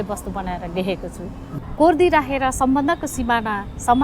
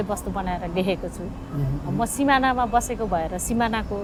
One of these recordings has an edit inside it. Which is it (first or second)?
first